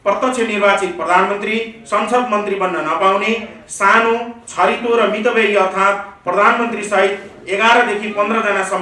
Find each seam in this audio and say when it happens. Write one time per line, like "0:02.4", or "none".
none